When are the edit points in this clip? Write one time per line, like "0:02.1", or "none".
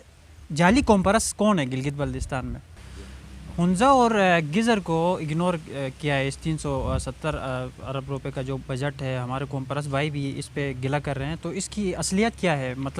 0:02.6